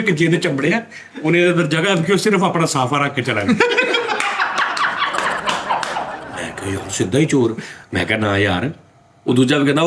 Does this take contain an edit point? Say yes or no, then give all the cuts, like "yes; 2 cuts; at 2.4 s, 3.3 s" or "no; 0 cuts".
yes; 1 cut; at 6.2 s